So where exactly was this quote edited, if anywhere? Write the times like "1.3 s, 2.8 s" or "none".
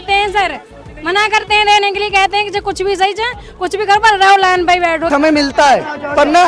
5.1 s